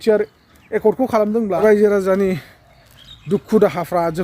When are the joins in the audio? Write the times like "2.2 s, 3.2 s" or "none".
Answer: 1.5 s